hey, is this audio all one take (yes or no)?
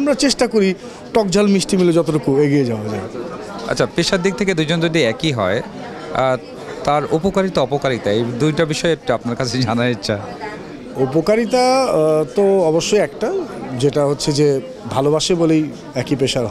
yes